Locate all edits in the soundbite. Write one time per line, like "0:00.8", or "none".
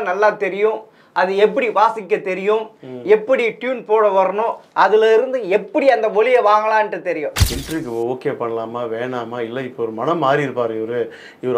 0:07.5